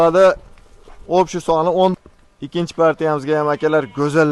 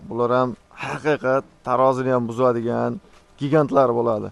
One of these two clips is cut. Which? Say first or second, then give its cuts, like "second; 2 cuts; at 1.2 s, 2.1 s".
first; 1 cut; at 1.9 s